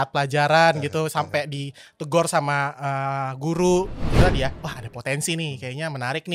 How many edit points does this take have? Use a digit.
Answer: 1